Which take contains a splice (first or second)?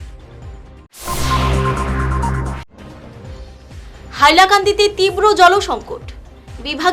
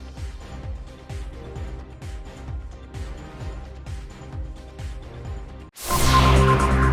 first